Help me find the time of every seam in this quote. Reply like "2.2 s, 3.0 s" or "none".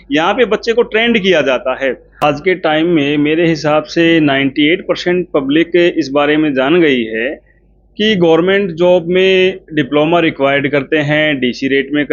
2.2 s